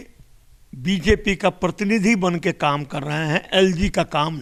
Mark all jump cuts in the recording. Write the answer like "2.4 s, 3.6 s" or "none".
none